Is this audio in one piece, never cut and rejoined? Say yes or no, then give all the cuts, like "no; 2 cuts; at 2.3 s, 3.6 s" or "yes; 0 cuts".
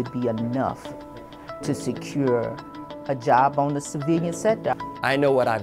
no; 1 cut; at 4.7 s